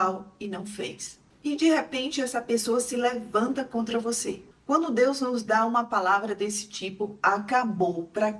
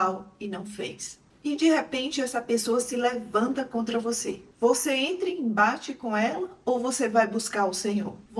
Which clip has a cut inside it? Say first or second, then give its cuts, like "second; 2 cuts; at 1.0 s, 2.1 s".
first; 1 cut; at 4.4 s